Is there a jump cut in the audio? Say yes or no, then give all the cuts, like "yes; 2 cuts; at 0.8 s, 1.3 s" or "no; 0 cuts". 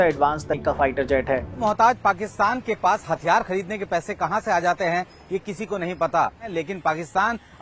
yes; 2 cuts; at 1.5 s, 6.5 s